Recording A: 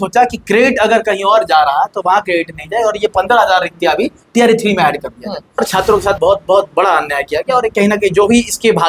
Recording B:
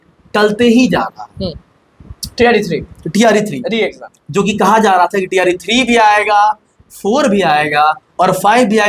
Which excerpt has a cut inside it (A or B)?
A